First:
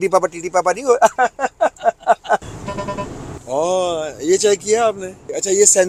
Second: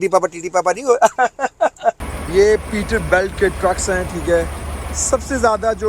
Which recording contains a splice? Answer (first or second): second